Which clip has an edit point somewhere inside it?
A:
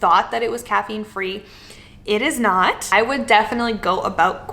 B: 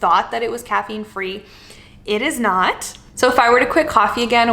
A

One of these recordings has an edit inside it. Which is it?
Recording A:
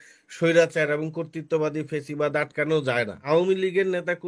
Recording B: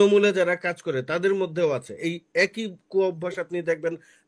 A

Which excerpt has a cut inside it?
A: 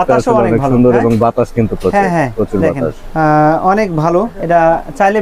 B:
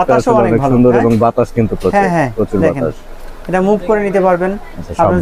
A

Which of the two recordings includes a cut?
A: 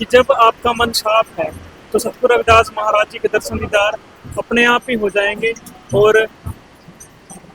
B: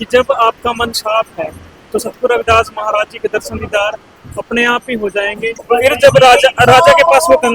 B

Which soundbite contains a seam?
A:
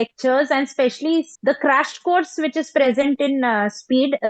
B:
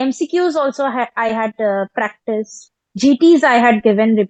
A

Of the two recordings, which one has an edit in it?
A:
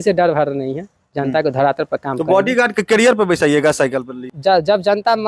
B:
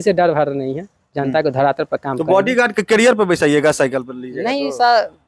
A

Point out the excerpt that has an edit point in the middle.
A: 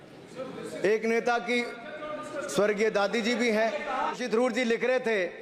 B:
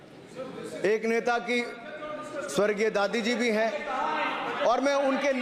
A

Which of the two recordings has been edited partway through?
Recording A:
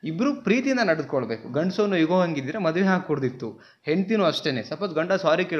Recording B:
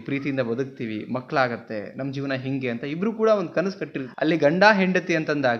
B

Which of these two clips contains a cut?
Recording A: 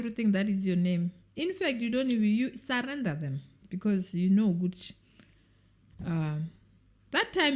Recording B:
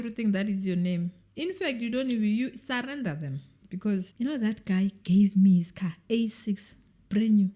B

